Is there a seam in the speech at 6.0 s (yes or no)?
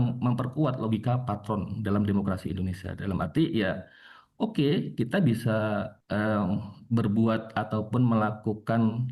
yes